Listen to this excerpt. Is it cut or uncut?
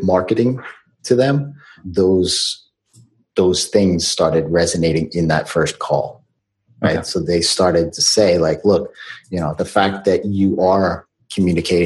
cut